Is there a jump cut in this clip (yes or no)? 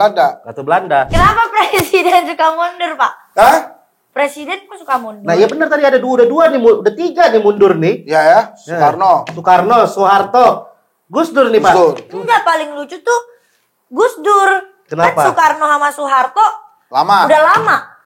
yes